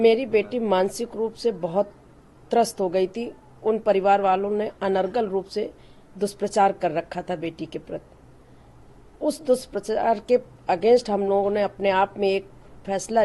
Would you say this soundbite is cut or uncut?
uncut